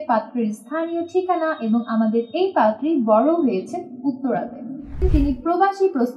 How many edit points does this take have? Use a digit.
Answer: 1